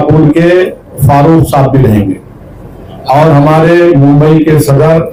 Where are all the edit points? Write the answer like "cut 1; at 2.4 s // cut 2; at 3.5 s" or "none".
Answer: none

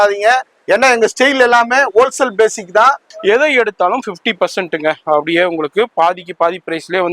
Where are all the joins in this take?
cut 1; at 3.1 s

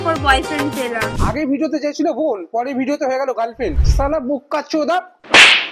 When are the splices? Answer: cut 1; at 1.1 s // cut 2; at 3.8 s

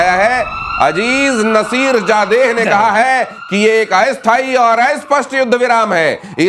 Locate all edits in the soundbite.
none

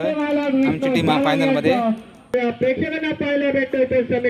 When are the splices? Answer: cut 1; at 2.3 s

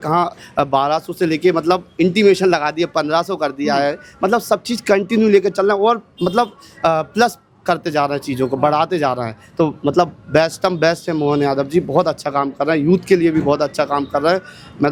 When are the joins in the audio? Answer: none

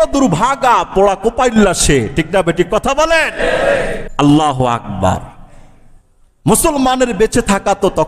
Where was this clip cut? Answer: cut 1; at 4.0 s

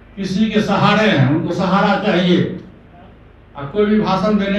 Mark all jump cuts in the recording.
none

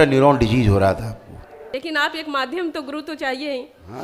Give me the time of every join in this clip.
cut 1; at 1.6 s

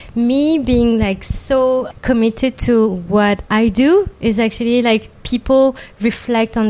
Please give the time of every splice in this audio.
cut 1; at 1.9 s

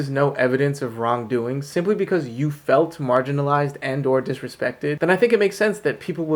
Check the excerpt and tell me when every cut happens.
none

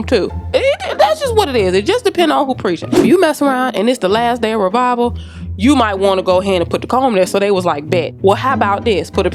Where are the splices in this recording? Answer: none

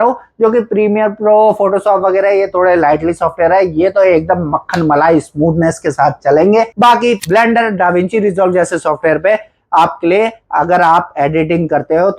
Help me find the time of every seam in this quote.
cut 1; at 6.9 s

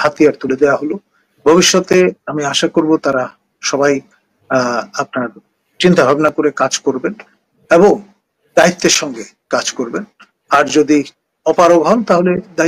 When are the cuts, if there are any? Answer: none

